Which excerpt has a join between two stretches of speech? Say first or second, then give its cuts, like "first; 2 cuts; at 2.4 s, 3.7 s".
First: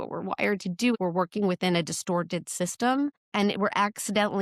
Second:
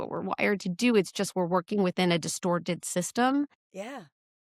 first; 2 cuts; at 0.9 s, 3.2 s